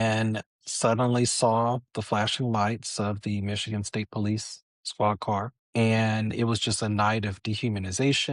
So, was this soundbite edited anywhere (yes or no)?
yes